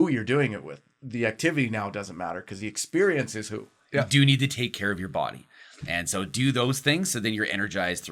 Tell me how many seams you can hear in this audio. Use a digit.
1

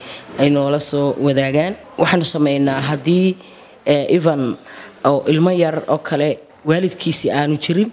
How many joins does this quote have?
1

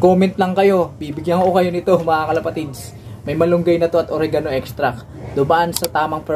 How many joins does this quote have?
0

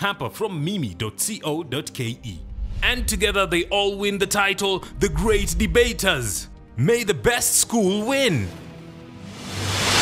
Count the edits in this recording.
1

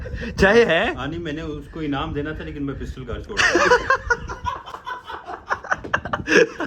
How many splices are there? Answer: 0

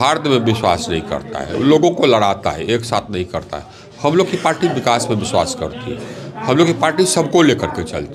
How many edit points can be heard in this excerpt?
0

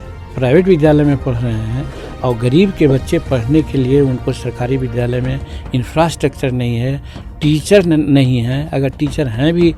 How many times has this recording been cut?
0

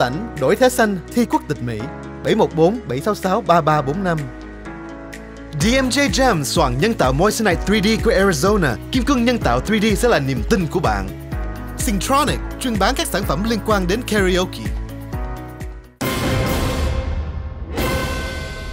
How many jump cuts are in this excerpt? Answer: 1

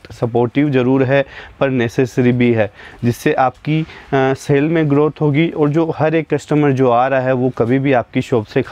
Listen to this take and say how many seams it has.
1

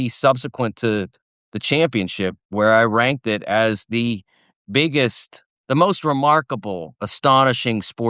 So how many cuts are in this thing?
0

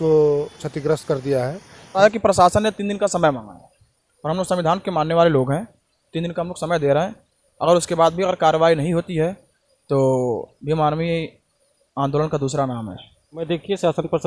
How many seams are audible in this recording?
2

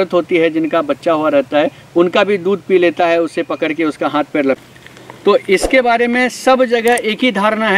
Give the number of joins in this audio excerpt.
2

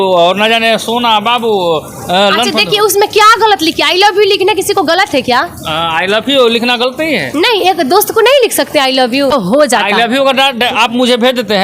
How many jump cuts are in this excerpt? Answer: 1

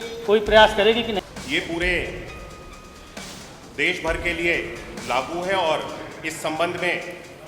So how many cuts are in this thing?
1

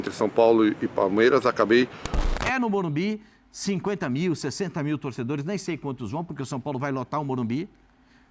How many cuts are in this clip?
1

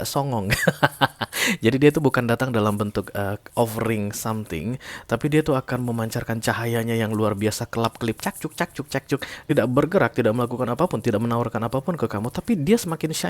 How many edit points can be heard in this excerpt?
1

